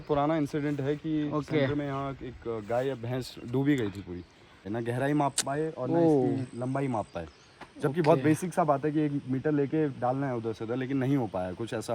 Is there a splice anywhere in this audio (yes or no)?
yes